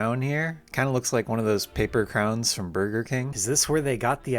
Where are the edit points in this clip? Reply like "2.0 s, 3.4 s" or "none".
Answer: 3.3 s